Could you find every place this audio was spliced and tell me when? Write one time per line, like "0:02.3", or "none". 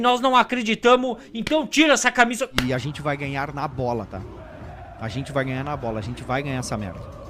0:02.6